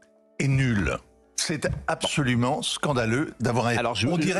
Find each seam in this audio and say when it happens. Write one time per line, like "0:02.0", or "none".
none